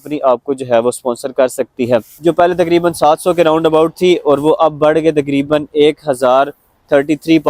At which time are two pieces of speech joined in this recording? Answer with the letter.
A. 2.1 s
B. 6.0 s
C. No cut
A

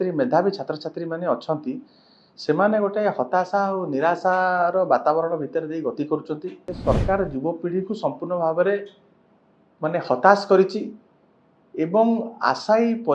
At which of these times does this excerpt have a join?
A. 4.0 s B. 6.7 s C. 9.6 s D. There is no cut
B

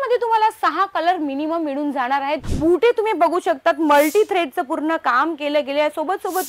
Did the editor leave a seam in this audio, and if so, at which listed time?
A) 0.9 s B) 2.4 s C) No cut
B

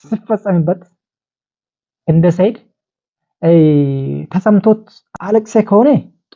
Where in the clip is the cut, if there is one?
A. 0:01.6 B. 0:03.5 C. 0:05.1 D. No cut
C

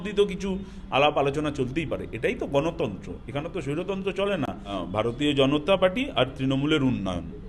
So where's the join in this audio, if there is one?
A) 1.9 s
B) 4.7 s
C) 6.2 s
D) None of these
B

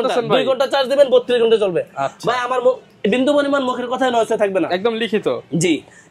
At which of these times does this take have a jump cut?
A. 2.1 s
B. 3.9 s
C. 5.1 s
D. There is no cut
D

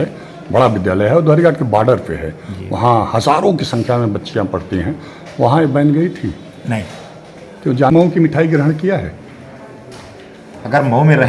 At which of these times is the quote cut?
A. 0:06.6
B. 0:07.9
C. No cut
B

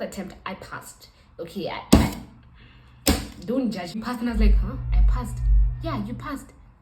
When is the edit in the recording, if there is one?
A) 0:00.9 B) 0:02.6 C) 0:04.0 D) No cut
C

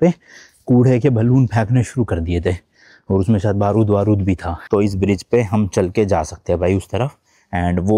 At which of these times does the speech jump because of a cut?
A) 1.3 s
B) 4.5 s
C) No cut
B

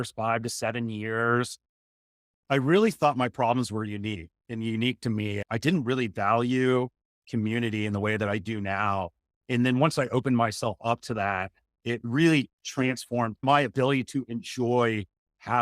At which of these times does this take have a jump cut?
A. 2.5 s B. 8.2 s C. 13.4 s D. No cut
C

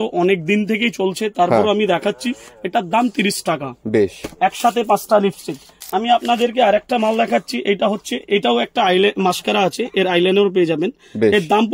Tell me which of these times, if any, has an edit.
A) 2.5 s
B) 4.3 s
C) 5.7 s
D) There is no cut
C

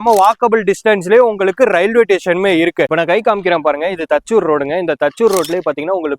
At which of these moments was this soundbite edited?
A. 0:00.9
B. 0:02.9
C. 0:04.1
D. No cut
B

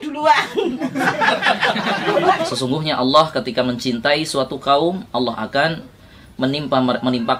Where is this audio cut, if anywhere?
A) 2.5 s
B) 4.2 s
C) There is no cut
A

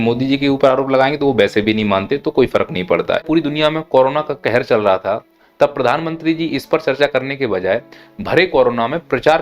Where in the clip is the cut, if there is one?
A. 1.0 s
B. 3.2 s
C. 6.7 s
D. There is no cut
B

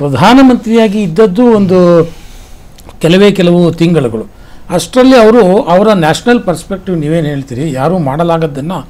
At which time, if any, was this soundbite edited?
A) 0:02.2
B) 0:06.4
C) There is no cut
C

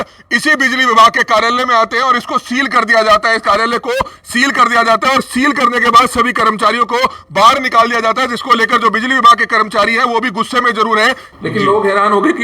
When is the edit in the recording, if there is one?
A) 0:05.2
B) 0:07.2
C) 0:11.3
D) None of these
C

